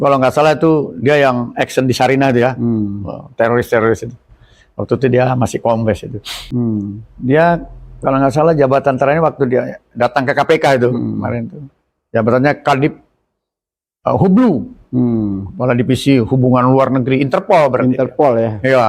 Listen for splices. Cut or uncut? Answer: cut